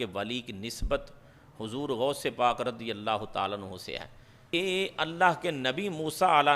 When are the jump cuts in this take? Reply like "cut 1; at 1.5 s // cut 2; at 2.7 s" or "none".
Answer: cut 1; at 4.5 s